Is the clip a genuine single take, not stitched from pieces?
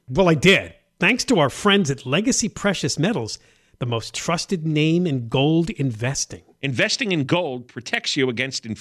yes; 0 cuts

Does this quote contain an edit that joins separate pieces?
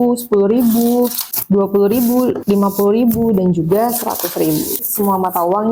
yes; 3 cuts; at 1.3 s, 2.4 s, 4.8 s

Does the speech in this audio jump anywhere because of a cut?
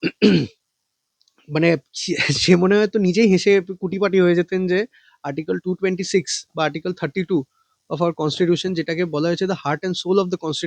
no; 0 cuts

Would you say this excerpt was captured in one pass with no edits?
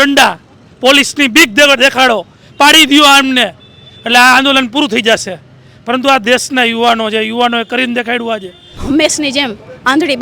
no; 1 cut; at 8.7 s

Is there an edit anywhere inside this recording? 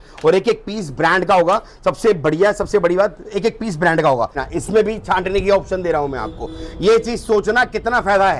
yes; 1 cut; at 4.4 s

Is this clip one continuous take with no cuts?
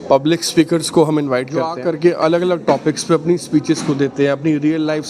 no; 1 cut; at 1.7 s

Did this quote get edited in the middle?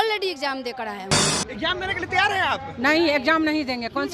yes; 1 cut; at 1.3 s

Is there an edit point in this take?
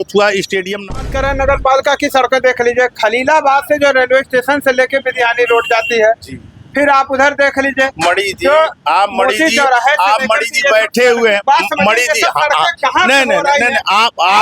yes; 1 cut; at 1.0 s

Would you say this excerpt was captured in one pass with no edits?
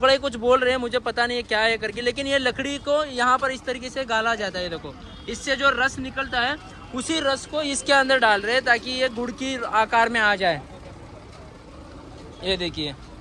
yes; 0 cuts

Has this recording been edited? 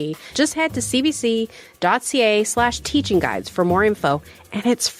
no; 0 cuts

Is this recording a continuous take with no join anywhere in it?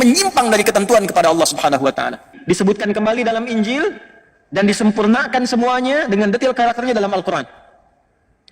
no; 1 cut; at 2.3 s

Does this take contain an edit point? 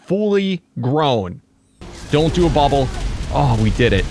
yes; 1 cut; at 1.8 s

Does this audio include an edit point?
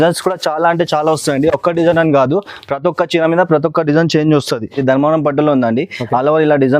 yes; 1 cut; at 4.7 s

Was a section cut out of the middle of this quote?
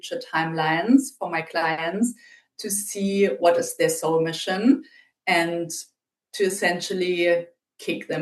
no; 0 cuts

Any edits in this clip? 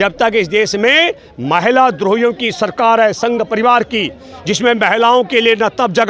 no; 0 cuts

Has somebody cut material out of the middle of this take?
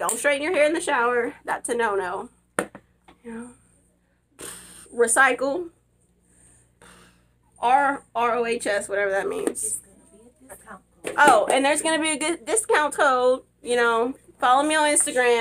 no; 0 cuts

